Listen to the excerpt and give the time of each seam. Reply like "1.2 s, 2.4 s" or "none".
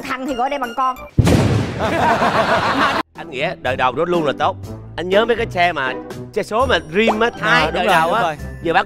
3.0 s